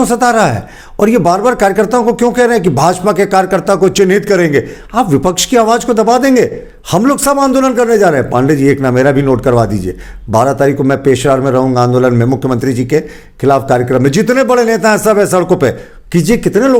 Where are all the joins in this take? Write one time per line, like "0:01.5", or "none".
none